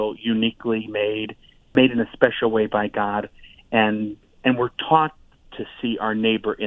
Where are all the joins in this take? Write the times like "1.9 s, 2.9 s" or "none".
1.7 s